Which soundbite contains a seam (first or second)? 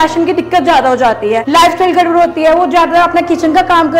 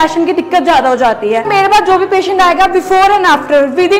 second